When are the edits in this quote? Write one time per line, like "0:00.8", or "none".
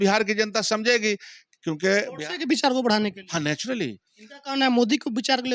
none